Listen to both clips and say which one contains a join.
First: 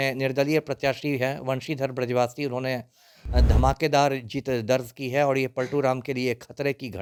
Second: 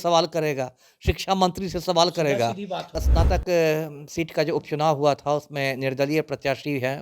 second; 1 cut; at 3.0 s

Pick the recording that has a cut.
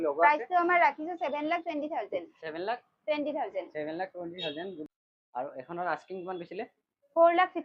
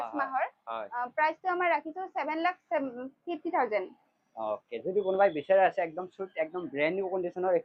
first; 1 cut; at 4.8 s

